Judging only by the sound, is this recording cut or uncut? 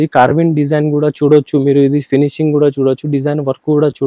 uncut